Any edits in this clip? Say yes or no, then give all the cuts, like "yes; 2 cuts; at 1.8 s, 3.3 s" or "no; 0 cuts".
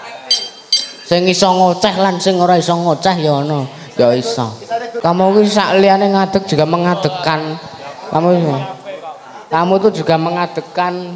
yes; 1 cut; at 4.9 s